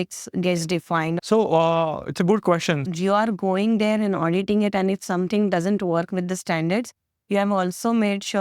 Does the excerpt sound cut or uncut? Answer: cut